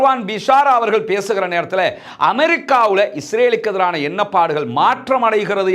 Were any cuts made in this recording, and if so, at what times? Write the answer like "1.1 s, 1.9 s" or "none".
none